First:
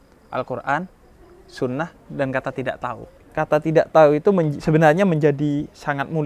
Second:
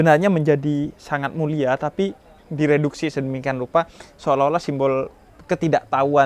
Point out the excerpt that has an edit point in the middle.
first; 1 cut; at 3.2 s

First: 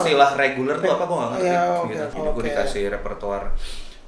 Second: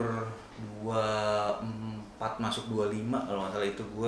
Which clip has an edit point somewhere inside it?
first; 1 cut; at 2.1 s

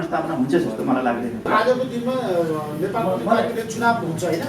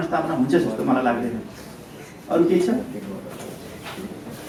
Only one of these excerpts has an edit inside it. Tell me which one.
first; 1 cut; at 1.5 s

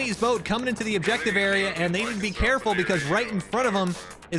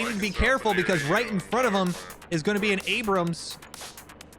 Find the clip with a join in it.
second; 1 cut; at 3.4 s

